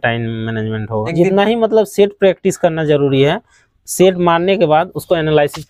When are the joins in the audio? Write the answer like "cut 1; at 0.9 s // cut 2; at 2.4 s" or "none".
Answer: cut 1; at 1.1 s